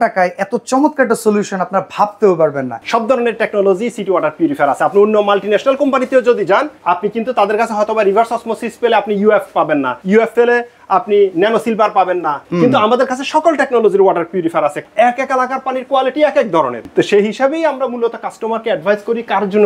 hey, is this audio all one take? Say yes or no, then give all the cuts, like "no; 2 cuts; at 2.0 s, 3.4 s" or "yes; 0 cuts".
no; 6 cuts; at 2.8 s, 6.7 s, 10.2 s, 12.5 s, 14.8 s, 16.8 s